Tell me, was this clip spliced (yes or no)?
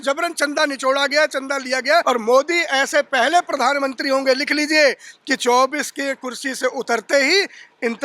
yes